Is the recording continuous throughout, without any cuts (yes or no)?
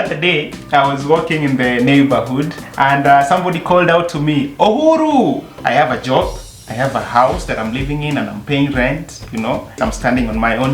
no